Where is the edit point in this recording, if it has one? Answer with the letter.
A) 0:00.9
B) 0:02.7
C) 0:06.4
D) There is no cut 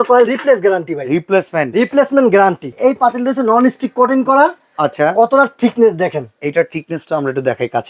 B